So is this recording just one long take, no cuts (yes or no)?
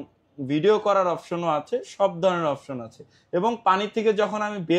yes